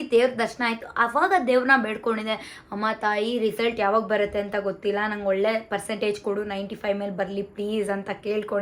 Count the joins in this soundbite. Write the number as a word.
zero